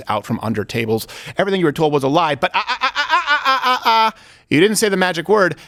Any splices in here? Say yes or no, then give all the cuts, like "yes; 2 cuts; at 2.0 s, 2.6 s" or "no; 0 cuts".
no; 0 cuts